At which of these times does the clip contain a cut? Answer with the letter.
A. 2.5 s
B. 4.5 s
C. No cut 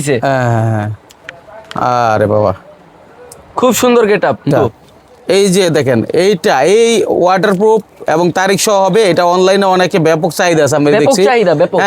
B